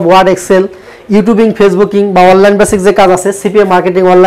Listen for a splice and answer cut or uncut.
uncut